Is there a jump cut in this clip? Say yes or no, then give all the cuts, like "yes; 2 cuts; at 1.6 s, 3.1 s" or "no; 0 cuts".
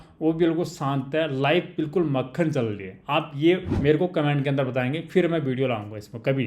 yes; 1 cut; at 3.7 s